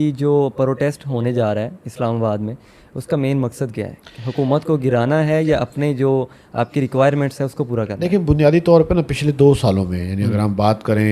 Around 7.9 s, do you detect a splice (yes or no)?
no